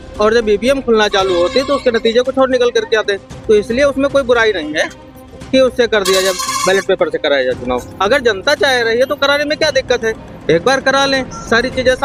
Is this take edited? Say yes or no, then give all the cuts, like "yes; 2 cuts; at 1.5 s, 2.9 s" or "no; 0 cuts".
no; 0 cuts